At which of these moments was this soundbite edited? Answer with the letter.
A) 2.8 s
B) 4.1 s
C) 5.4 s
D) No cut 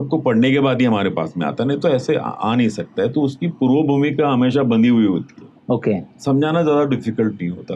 D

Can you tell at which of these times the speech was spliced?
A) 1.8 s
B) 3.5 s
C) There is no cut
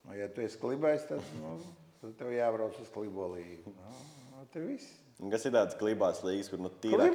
C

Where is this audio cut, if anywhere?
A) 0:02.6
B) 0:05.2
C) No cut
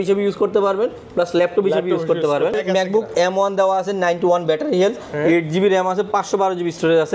A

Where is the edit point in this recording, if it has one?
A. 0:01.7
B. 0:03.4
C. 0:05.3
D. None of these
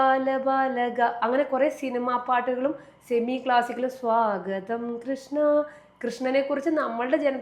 D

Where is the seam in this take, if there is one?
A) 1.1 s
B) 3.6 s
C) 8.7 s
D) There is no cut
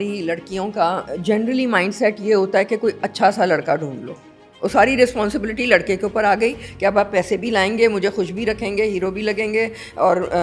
A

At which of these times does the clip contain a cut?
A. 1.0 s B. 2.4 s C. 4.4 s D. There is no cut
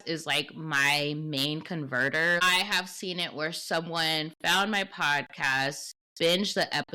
B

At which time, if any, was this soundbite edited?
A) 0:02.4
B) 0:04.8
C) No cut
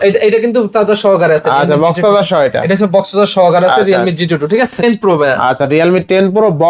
B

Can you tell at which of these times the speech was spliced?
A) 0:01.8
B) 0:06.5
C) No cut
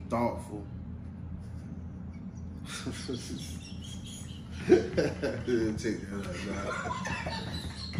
C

